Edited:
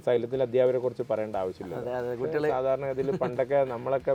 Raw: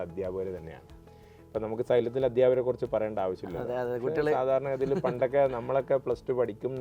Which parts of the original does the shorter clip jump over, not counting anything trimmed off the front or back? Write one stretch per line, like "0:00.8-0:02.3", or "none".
none